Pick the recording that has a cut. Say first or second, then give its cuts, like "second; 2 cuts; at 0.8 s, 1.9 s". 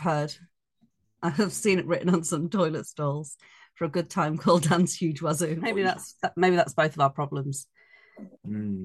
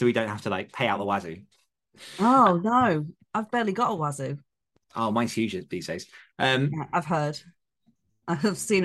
first; 1 cut; at 5.7 s